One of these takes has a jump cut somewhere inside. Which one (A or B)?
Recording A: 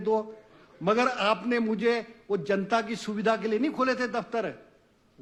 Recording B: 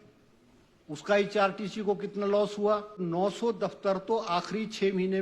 B